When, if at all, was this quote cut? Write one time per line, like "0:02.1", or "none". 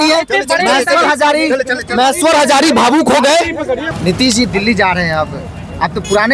none